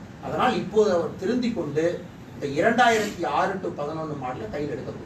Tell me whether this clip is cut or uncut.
uncut